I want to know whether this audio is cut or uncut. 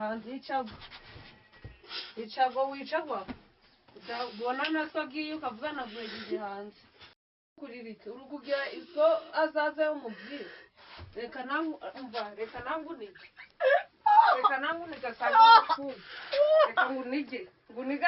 cut